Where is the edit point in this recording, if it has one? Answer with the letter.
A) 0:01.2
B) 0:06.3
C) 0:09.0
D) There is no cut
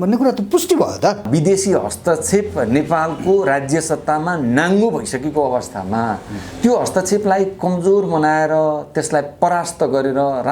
A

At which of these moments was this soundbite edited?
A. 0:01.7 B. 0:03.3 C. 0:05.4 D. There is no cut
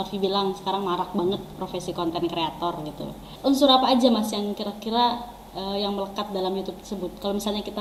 B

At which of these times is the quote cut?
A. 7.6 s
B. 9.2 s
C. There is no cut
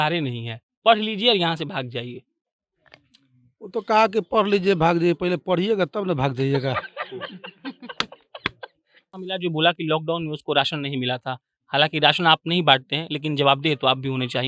B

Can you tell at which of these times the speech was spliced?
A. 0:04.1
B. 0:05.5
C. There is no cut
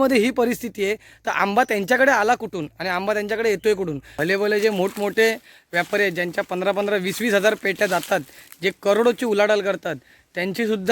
A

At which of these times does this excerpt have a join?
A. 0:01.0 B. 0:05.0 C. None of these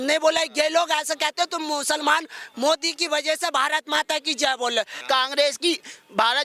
B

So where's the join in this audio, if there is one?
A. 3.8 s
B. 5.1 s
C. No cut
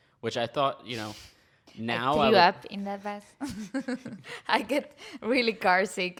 C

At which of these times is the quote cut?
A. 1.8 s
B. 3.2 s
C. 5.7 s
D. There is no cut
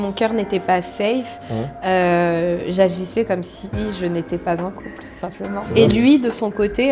C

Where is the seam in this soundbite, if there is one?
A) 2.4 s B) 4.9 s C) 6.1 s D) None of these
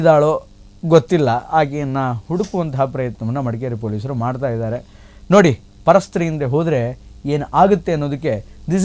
D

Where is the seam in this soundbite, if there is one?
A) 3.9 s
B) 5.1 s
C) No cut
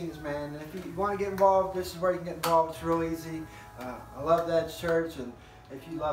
B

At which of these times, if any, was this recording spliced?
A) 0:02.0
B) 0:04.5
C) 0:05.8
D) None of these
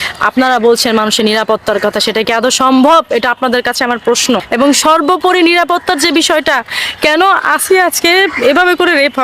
B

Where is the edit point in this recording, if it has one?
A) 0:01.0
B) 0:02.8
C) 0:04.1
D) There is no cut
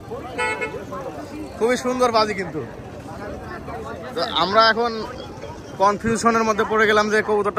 C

